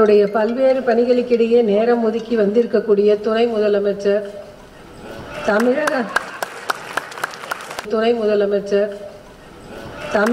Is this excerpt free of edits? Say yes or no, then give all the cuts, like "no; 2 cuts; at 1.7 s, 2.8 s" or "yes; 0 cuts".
no; 1 cut; at 7.9 s